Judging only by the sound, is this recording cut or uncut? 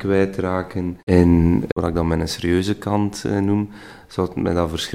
uncut